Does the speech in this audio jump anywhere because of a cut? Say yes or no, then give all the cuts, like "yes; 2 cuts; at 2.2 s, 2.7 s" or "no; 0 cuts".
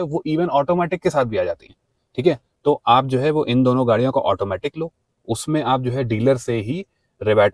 no; 0 cuts